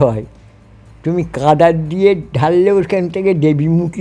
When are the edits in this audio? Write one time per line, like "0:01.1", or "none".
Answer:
none

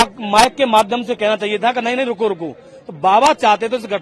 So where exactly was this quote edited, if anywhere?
none

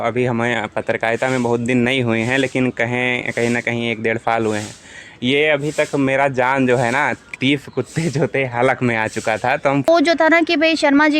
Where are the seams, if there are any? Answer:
0:09.9

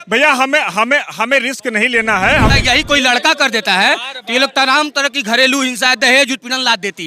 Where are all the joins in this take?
0:02.5

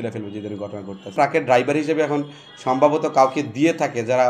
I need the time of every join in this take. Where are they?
0:01.1

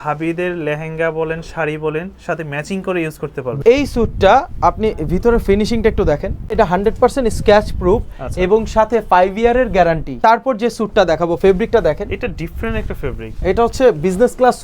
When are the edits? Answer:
0:03.6
0:06.6
0:10.1
0:13.3

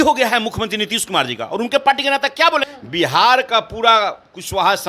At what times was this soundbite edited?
0:02.6

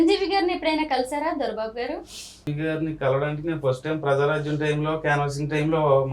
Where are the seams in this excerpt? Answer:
0:02.5

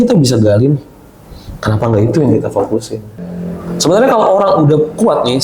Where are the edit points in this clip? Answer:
0:03.2

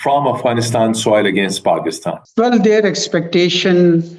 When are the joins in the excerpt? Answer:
0:02.2

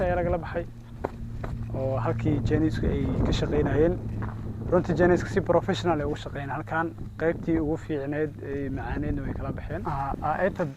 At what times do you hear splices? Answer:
0:09.8

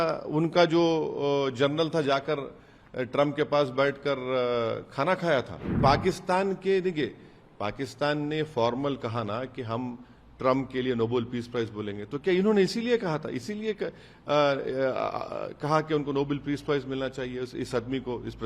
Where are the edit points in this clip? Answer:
0:05.8

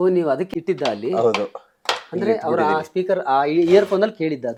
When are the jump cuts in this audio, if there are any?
none

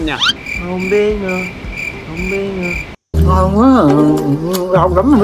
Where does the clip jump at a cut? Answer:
0:02.9

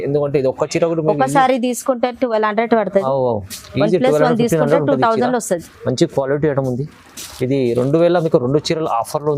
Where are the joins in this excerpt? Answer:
none

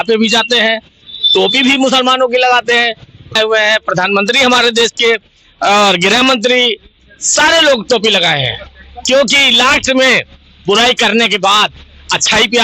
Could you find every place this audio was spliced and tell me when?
0:03.3

